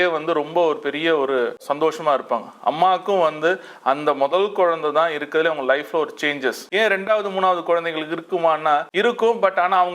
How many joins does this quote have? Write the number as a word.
three